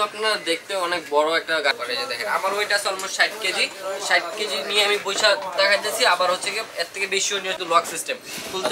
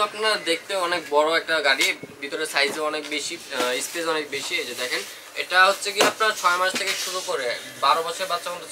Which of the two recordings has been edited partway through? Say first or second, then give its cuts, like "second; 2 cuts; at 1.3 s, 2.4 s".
first; 2 cuts; at 1.8 s, 7.6 s